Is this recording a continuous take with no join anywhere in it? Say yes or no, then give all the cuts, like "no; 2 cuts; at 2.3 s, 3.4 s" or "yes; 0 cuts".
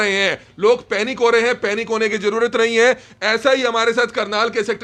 yes; 0 cuts